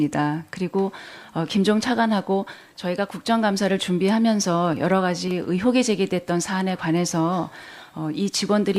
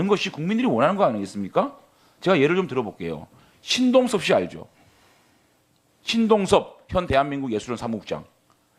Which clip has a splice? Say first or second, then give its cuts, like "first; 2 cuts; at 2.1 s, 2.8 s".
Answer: first; 1 cut; at 2.1 s